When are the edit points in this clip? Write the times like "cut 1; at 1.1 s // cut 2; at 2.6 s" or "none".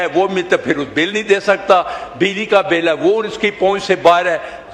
none